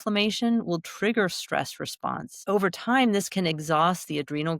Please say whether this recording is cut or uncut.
cut